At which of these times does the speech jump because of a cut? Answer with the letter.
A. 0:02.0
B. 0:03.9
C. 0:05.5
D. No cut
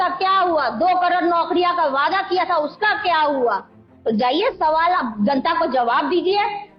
D